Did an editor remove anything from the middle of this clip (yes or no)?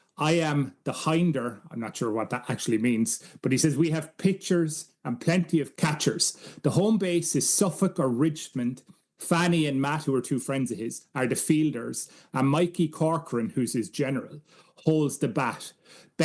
yes